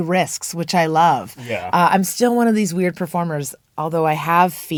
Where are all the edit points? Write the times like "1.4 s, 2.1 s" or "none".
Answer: none